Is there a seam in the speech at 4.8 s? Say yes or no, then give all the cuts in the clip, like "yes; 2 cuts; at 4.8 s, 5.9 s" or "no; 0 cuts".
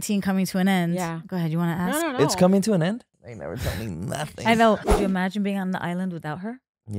yes; 2 cuts; at 3.1 s, 4.8 s